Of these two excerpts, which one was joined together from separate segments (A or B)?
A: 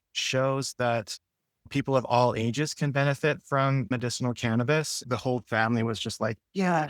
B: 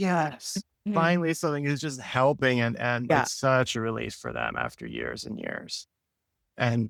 A